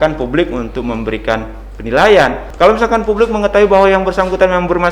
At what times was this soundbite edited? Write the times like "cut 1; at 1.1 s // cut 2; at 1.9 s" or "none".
cut 1; at 2.4 s